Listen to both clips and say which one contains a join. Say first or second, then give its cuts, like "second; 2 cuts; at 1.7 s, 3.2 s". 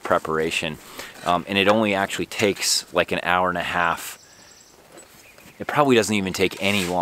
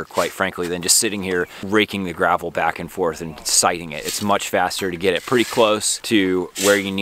second; 2 cuts; at 1.6 s, 5.9 s